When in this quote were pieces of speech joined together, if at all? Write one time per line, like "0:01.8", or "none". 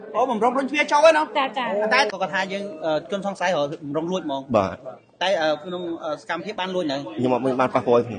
0:02.1